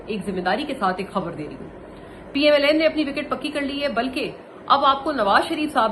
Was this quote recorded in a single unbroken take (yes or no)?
yes